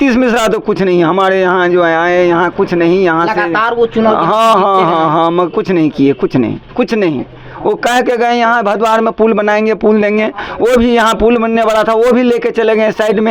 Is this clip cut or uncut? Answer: uncut